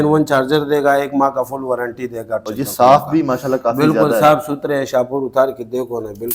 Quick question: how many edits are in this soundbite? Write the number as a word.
one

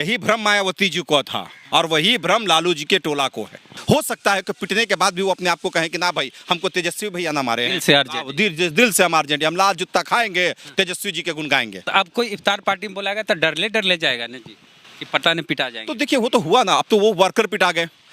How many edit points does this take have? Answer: two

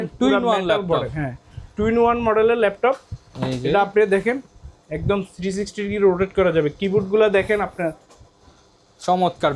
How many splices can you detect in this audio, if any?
zero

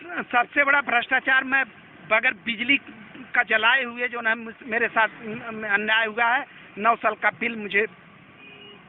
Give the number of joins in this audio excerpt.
zero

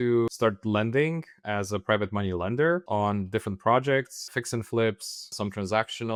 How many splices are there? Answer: zero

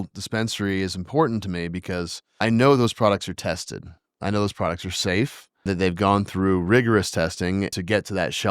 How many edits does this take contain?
three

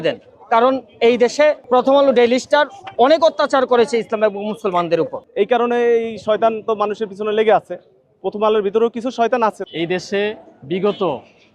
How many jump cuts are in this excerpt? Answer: three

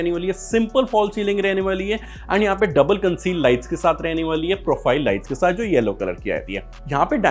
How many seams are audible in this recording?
zero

